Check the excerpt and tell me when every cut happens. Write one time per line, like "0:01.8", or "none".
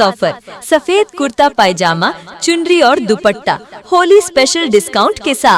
none